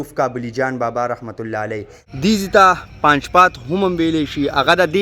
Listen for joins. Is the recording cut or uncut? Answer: cut